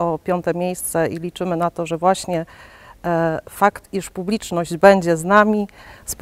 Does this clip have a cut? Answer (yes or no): no